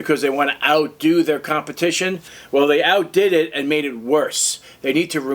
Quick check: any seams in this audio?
no; 0 cuts

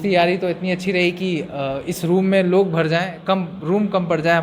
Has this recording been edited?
no; 0 cuts

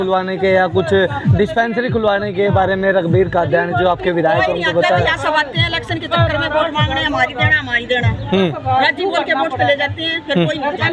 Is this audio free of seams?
yes; 0 cuts

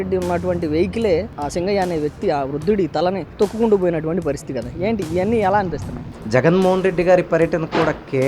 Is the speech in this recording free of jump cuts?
no; 3 cuts; at 1.3 s, 3.3 s, 6.1 s

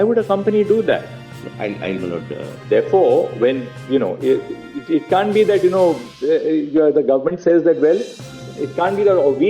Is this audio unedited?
yes; 0 cuts

